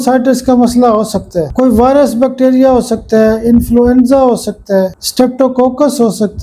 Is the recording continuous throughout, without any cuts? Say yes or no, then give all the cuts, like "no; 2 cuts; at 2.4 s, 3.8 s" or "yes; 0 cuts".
no; 2 cuts; at 1.5 s, 5.0 s